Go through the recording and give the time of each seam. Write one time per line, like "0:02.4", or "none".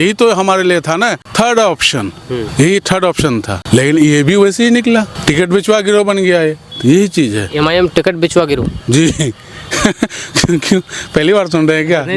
0:01.2
0:02.5
0:03.5
0:05.1